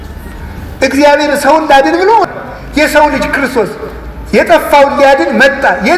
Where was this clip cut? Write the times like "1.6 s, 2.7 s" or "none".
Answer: 2.3 s